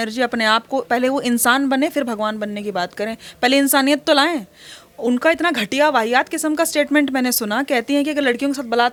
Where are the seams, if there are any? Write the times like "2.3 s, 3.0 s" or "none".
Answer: none